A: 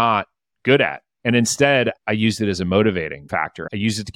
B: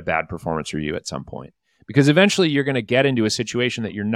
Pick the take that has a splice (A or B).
A